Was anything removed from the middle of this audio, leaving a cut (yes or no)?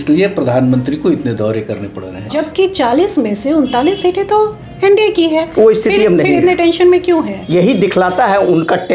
yes